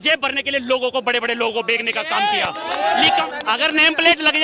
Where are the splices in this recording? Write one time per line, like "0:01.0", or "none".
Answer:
0:03.2